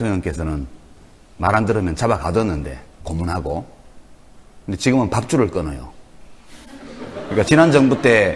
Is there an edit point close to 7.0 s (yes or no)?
no